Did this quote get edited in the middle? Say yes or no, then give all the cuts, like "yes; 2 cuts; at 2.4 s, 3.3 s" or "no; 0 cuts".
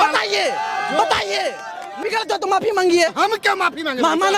yes; 1 cut; at 2.0 s